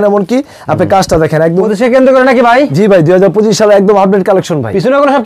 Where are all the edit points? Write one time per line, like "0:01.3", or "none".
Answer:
0:01.6